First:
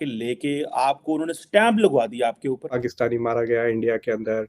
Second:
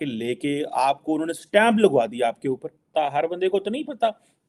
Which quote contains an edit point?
first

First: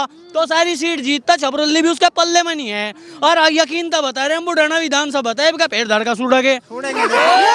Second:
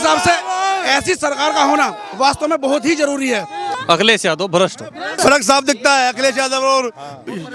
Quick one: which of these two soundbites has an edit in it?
second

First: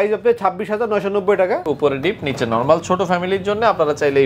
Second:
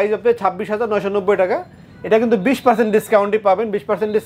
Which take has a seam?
first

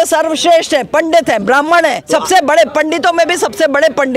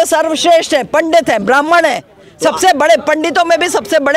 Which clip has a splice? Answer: first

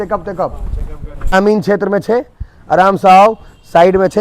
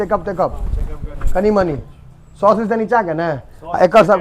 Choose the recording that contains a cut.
first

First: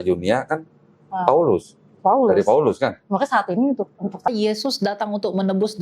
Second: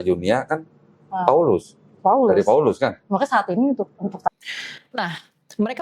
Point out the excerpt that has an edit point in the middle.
first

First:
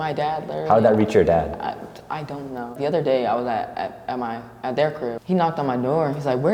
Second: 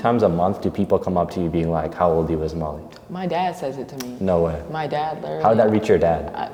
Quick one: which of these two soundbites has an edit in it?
first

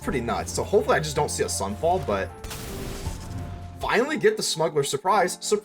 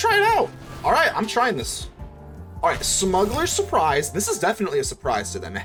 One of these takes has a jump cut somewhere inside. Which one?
first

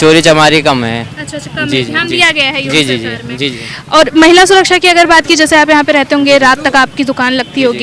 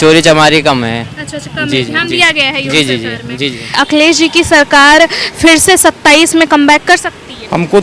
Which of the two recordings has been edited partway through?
second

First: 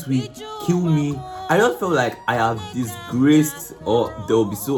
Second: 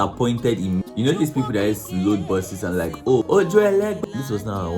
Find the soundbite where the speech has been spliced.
second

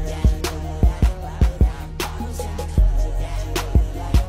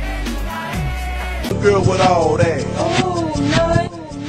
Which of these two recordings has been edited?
second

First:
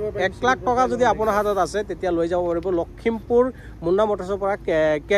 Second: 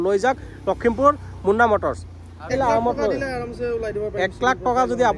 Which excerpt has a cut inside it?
second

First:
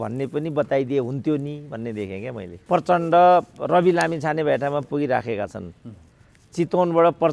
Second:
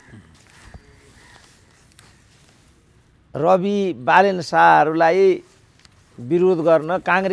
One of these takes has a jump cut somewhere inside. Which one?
first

